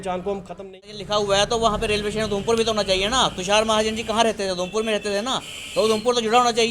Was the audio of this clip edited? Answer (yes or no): yes